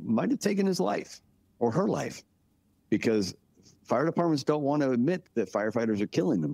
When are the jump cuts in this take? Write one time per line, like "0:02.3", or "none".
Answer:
0:05.2